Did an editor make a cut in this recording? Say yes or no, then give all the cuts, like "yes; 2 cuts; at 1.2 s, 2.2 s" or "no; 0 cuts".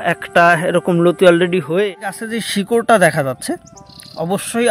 yes; 1 cut; at 2.3 s